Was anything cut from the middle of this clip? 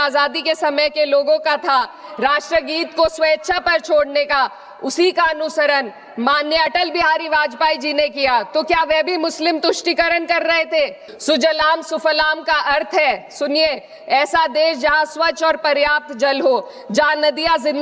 yes; 1 cut; at 11.1 s

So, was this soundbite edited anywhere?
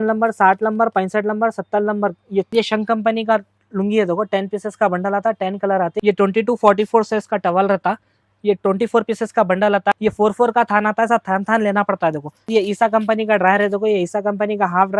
yes; 4 cuts; at 2.5 s, 6.0 s, 9.9 s, 12.5 s

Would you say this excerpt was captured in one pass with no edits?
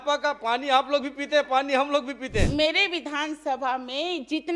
no; 1 cut; at 2.5 s

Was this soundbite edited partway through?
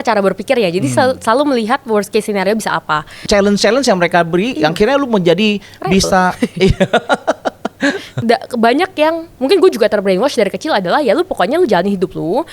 yes; 2 cuts; at 3.2 s, 8.1 s

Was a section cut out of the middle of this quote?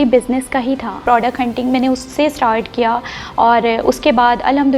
yes; 1 cut; at 1.0 s

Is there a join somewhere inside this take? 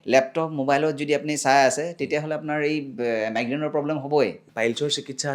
yes; 1 cut; at 4.4 s

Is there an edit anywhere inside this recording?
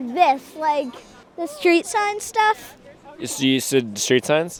no; 0 cuts

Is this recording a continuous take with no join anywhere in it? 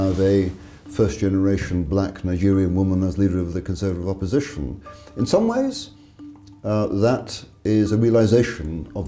yes; 0 cuts

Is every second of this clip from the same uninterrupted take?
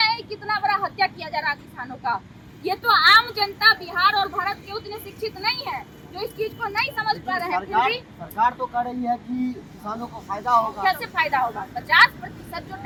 yes; 0 cuts

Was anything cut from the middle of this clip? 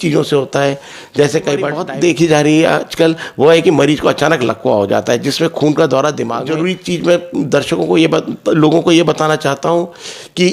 yes; 2 cuts; at 1.8 s, 6.4 s

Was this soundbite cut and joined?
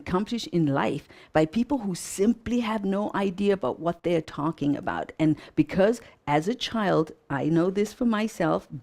no; 0 cuts

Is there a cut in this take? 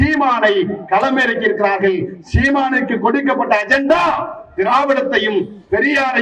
no; 0 cuts

